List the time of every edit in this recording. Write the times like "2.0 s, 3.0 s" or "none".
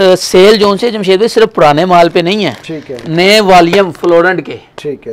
none